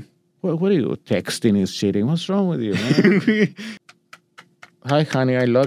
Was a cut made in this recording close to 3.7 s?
yes; 1 cut; at 3.7 s

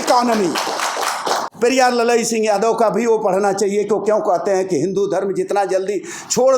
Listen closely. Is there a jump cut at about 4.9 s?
no; 1 cut; at 1.5 s

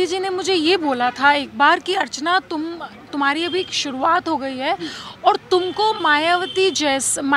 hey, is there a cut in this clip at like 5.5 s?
no; 0 cuts

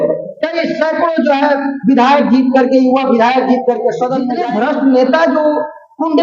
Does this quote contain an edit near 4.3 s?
yes; 1 cut; at 4.3 s

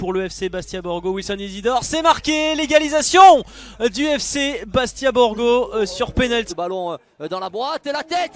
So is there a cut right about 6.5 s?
yes; 1 cut; at 6.5 s

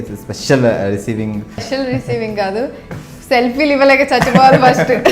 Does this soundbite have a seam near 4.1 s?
no; 1 cut; at 1.6 s

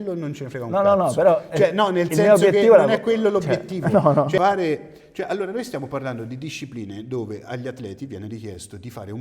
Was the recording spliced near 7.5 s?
no; 1 cut; at 4.4 s

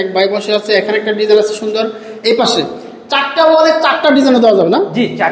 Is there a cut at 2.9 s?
no; 0 cuts

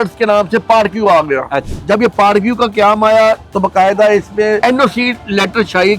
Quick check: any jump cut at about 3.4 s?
no; 2 cuts; at 1.7 s, 4.6 s

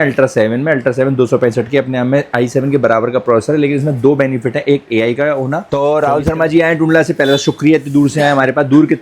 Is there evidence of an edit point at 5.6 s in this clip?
yes; 1 cut; at 5.6 s

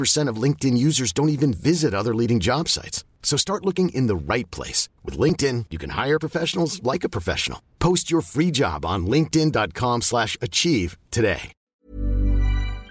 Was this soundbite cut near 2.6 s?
no; 1 cut; at 11.7 s

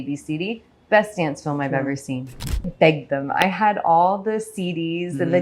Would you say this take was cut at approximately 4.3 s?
no; 1 cut; at 2.7 s

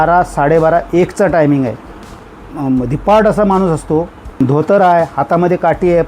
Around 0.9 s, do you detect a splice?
no; 2 cuts; at 2.2 s, 4.4 s

